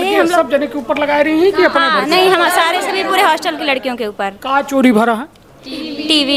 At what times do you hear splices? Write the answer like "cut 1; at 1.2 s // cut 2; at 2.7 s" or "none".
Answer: none